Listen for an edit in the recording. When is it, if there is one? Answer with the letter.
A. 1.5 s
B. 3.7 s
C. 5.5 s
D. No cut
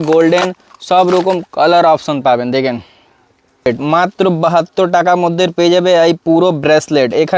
B